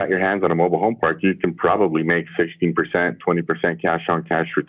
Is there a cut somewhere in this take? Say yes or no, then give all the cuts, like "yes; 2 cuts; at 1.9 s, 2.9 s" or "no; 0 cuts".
no; 0 cuts